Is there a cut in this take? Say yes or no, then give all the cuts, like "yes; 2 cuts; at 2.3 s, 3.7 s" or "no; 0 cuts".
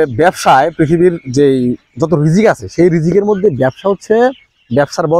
no; 0 cuts